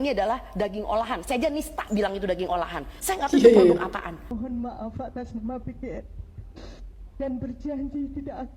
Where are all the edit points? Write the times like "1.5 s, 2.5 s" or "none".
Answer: 4.3 s